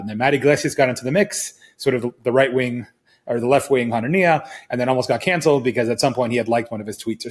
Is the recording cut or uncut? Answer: uncut